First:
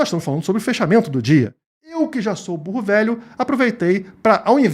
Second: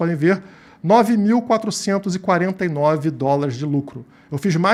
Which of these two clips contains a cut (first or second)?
first